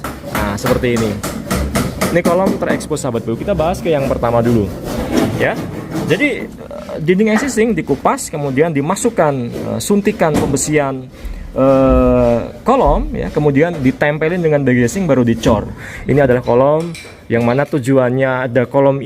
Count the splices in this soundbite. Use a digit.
2